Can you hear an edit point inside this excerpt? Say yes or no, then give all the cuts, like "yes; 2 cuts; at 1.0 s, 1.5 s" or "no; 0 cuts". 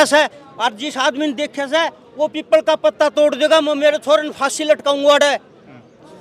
no; 0 cuts